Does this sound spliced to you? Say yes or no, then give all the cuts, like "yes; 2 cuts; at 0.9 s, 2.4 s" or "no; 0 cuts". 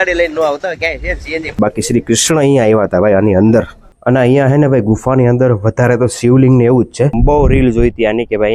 yes; 3 cuts; at 1.6 s, 3.9 s, 7.2 s